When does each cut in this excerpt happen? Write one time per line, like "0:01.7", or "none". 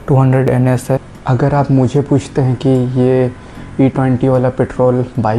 0:01.2